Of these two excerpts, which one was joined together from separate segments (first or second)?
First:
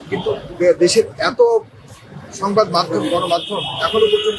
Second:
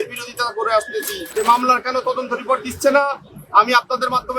second